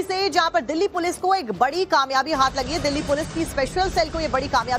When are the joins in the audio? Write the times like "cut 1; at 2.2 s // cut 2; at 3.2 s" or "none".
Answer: cut 1; at 1.9 s